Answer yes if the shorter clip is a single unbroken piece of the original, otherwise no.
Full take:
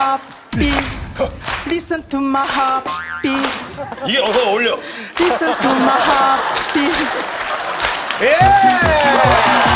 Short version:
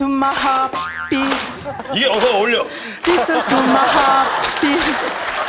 yes